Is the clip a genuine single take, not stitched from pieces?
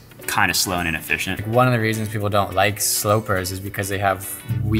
no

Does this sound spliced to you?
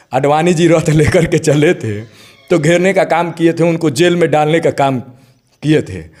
no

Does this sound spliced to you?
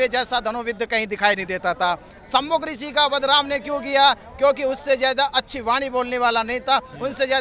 no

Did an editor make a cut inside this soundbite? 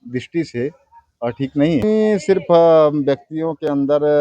yes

